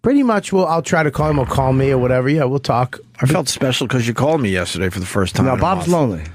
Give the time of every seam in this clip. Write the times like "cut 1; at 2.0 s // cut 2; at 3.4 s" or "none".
cut 1; at 4.7 s